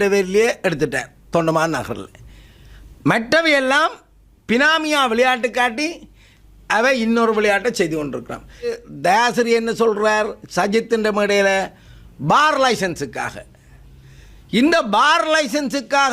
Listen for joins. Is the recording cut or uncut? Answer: cut